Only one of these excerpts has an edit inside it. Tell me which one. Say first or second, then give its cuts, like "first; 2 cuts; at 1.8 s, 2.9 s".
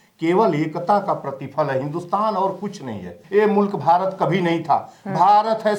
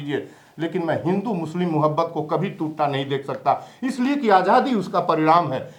first; 1 cut; at 3.2 s